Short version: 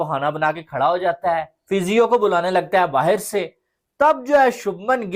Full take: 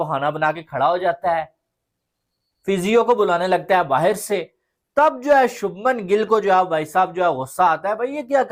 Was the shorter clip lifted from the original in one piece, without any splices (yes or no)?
no